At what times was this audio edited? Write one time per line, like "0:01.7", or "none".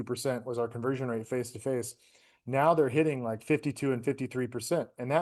none

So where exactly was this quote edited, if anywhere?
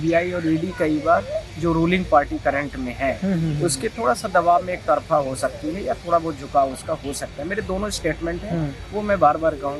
none

